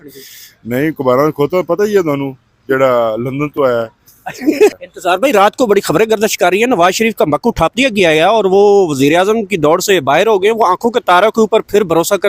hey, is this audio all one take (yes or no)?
no